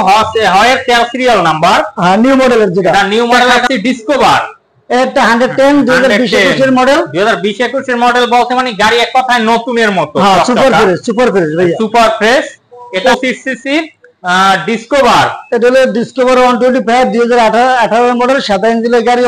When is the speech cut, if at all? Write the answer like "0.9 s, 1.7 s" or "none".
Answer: 3.6 s, 13.0 s